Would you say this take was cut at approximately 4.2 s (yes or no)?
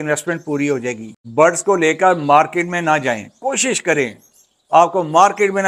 no